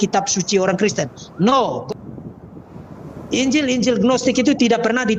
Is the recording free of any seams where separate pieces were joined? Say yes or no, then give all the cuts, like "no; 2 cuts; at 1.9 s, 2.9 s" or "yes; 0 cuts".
yes; 0 cuts